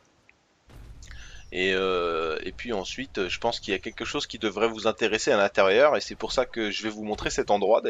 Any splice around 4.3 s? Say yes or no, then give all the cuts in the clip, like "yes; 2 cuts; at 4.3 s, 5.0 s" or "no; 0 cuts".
no; 1 cut; at 2.5 s